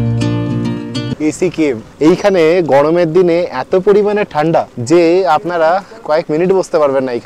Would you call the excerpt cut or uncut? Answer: cut